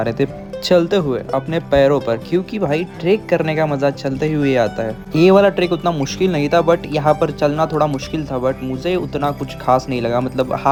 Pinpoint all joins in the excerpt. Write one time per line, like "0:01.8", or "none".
none

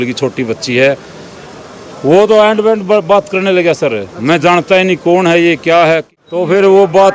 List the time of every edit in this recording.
0:06.2

